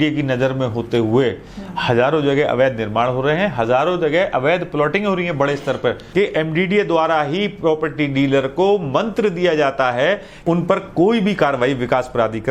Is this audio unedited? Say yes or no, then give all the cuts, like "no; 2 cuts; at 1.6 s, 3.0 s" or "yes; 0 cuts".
no; 2 cuts; at 6.0 s, 10.4 s